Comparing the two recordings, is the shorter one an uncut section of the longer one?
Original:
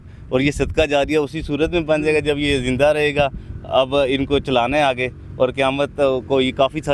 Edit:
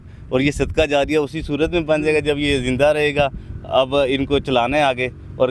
yes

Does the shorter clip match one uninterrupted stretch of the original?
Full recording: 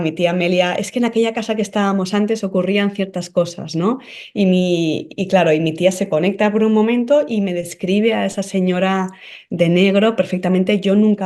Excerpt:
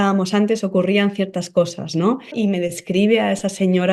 no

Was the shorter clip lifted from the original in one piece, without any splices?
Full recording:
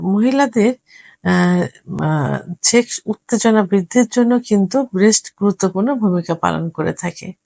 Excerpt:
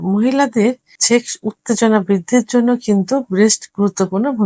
no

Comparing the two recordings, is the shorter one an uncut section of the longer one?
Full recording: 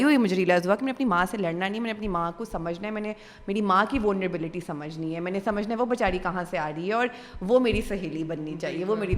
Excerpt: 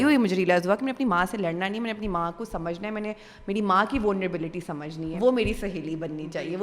no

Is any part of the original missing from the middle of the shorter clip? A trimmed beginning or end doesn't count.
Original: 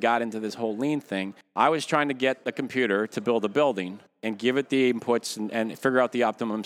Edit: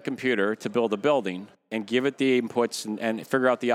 no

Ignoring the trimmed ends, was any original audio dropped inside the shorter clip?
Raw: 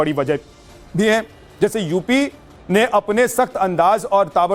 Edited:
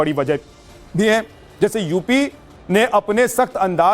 no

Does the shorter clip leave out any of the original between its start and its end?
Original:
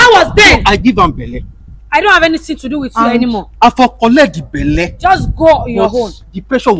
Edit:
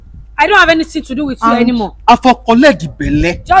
no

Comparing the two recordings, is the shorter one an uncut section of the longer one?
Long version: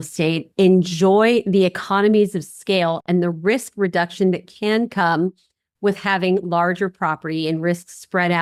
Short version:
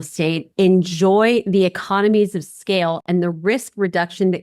yes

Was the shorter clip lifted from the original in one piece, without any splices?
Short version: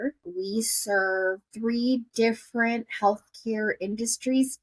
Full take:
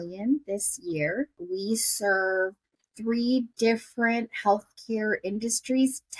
no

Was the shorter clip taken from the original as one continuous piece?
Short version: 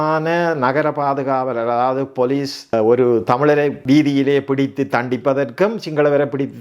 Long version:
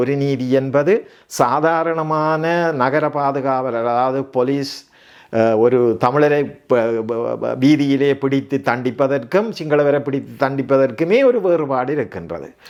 no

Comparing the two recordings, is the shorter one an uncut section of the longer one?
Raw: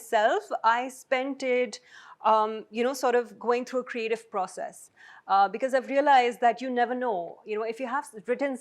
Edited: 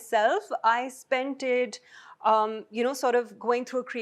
yes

